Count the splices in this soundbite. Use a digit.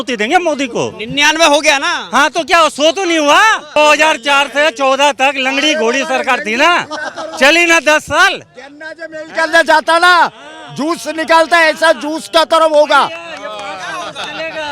1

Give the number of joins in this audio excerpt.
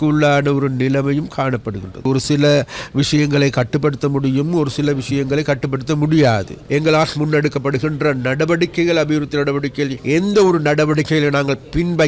3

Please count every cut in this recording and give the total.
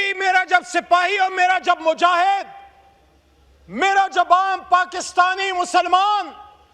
0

